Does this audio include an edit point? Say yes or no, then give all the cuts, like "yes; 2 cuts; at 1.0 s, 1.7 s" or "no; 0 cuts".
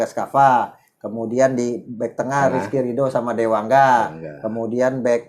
no; 0 cuts